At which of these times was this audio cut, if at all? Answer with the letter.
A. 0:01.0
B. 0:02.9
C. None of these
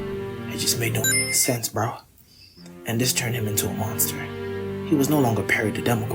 A